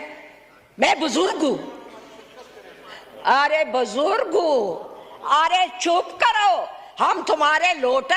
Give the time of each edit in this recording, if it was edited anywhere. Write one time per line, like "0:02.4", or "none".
none